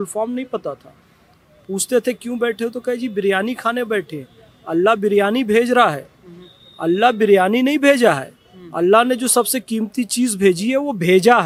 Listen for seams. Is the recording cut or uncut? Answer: uncut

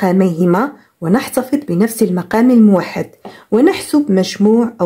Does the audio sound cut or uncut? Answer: uncut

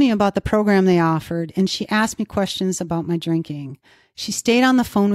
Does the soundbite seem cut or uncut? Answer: uncut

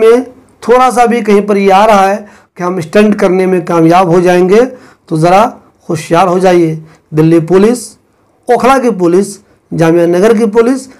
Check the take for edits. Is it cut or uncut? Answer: uncut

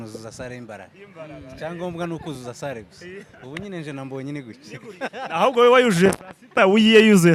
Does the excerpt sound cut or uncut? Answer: uncut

